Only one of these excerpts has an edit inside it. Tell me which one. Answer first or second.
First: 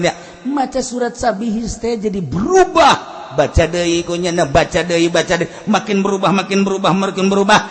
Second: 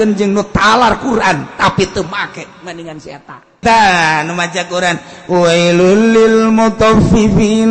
second